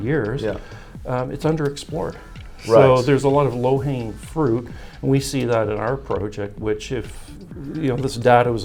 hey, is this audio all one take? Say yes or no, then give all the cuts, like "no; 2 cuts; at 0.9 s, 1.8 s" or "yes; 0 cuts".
yes; 0 cuts